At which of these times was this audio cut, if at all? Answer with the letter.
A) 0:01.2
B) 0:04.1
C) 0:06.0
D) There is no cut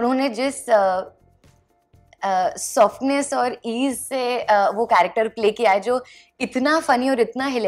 D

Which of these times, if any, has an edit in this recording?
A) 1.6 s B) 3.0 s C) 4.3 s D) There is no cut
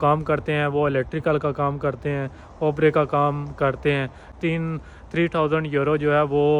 C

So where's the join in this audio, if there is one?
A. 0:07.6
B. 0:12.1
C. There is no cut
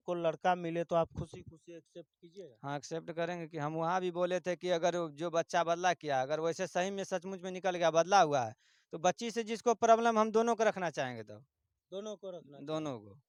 C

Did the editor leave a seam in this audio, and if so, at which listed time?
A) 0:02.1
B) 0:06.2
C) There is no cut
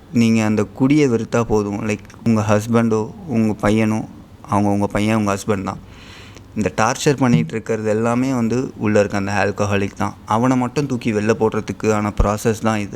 A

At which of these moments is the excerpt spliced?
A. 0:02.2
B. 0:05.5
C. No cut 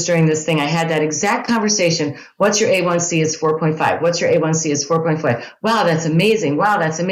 C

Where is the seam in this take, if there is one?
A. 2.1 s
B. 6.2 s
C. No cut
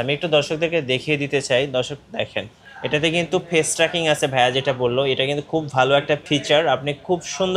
B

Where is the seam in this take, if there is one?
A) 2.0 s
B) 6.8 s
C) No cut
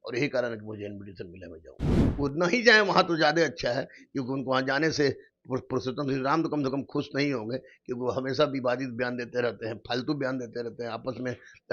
A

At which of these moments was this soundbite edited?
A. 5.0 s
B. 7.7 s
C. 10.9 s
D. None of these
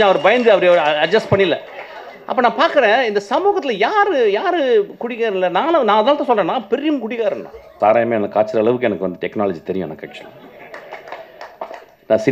B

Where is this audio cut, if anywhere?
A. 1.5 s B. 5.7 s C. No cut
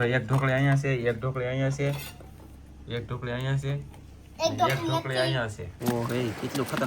B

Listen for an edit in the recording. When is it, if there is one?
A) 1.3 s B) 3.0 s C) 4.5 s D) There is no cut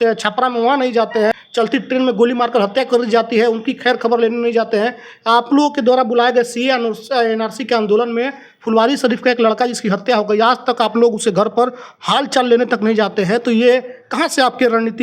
A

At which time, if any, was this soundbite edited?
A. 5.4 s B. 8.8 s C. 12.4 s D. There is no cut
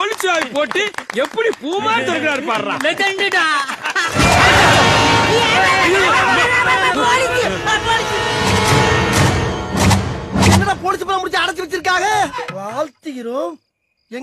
C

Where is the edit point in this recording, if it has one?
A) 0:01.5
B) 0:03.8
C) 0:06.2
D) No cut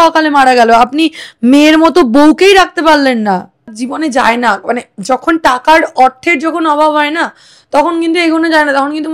B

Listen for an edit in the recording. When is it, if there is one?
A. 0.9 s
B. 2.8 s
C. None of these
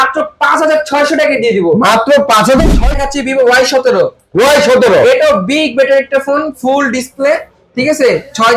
B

